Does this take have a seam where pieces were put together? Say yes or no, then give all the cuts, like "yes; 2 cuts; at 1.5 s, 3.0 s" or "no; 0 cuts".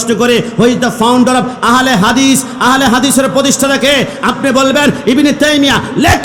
no; 0 cuts